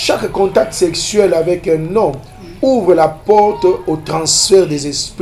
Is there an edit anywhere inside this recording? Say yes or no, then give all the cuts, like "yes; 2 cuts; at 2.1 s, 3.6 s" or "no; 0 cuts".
no; 0 cuts